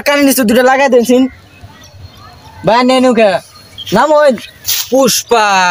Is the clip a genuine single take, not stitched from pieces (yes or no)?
yes